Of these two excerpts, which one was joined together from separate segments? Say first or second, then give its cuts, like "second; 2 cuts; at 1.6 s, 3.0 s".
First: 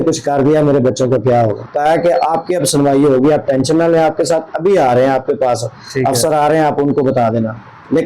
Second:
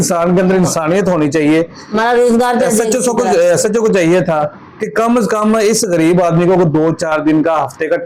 first; 1 cut; at 1.7 s